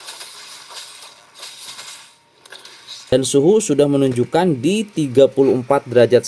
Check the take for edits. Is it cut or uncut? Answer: cut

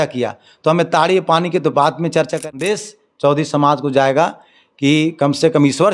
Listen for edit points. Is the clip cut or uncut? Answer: cut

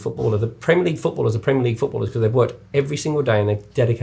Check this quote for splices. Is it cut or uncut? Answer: uncut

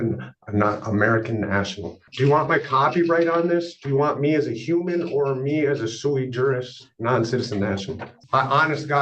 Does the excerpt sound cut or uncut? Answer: cut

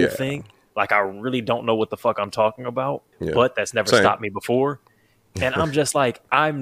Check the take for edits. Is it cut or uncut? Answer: uncut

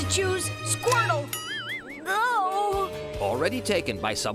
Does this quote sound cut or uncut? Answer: uncut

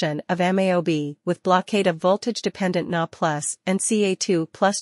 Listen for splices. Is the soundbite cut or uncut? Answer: cut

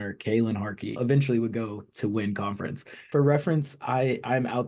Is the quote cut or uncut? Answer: cut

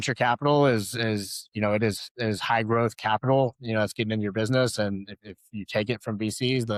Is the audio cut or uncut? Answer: uncut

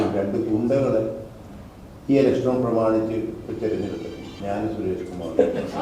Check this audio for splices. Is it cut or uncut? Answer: cut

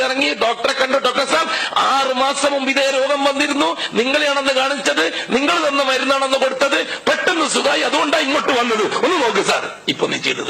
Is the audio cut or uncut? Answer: uncut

